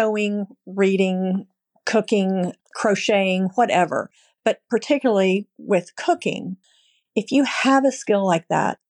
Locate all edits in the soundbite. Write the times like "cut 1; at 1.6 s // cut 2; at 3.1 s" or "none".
cut 1; at 2.6 s // cut 2; at 6.5 s